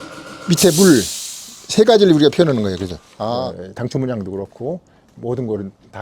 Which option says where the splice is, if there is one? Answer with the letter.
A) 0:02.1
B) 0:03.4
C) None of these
B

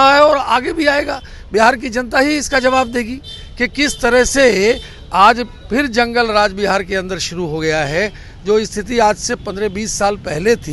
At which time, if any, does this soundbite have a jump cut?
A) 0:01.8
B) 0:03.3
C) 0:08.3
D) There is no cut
D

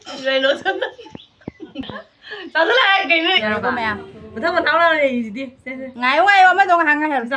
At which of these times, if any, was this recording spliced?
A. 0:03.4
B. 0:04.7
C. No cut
A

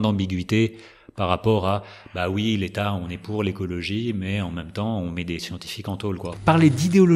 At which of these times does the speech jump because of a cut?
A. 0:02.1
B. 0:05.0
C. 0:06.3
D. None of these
C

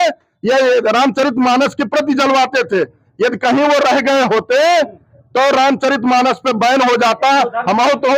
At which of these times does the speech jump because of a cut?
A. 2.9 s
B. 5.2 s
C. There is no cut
C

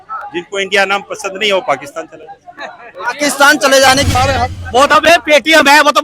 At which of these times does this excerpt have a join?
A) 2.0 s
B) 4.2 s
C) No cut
B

